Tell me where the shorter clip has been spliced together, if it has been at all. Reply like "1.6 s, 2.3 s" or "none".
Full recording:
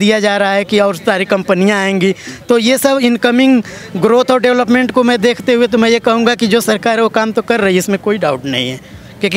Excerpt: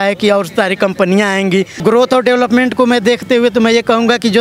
1.7 s